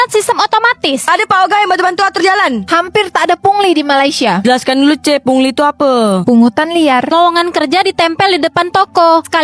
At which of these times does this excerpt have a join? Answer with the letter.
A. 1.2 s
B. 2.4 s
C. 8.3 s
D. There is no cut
D